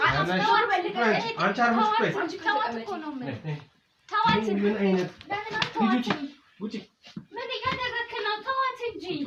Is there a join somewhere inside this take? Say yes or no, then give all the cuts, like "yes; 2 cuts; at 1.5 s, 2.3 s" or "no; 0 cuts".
no; 0 cuts